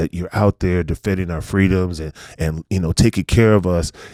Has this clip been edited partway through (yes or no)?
no